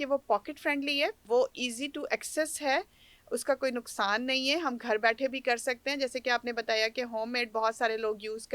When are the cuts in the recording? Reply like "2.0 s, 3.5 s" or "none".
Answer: none